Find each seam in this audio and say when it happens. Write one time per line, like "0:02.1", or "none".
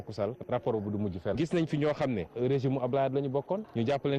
0:02.3